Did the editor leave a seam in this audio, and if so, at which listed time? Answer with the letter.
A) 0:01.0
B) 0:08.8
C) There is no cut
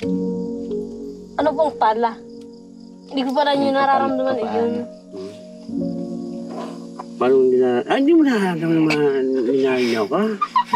A